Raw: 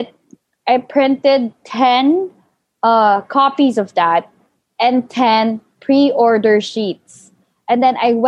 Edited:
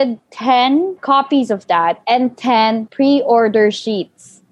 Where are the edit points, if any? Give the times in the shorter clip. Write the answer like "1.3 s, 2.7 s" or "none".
1.0 s, 2.0 s, 2.9 s

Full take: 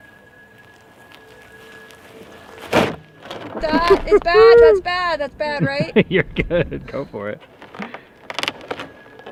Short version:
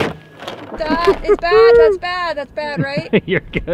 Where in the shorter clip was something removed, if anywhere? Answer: none

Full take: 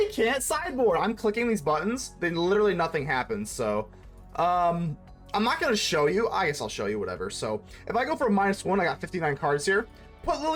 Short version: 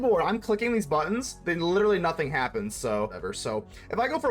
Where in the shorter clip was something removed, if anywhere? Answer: 3.3 s

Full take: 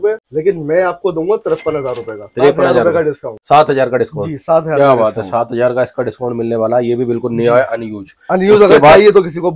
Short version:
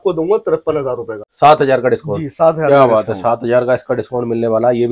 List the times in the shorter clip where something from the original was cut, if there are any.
1.2 s

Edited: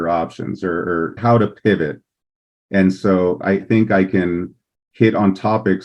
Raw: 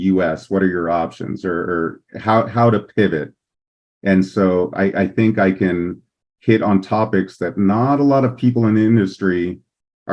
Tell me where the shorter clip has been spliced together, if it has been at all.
1.2 s, 3.6 s

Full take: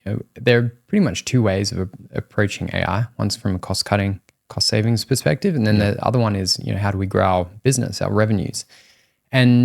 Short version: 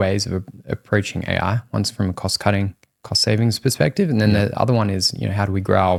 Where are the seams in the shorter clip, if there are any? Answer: none

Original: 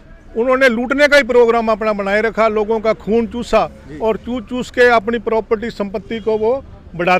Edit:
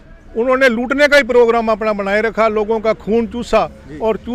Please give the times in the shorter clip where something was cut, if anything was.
none

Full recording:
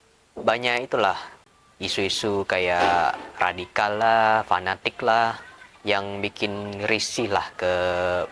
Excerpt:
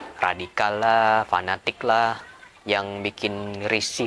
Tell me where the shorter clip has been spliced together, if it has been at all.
none

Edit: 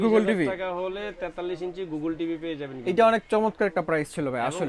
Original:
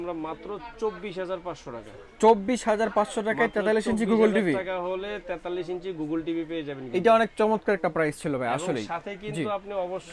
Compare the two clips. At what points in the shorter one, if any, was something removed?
none

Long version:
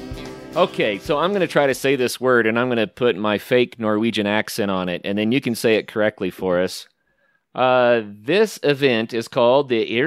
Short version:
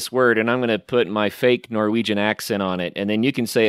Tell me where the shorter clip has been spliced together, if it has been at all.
none

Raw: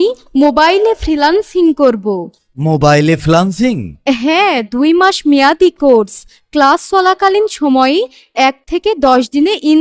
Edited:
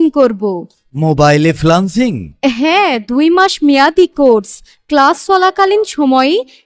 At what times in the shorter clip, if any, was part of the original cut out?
none

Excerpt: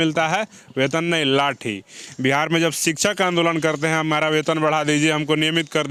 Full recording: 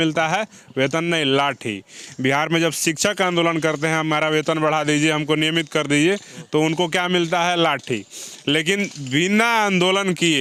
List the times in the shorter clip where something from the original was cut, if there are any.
none

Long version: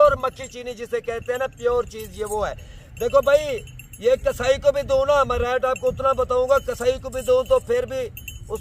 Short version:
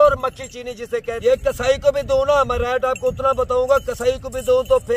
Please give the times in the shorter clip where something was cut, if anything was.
1.1 s

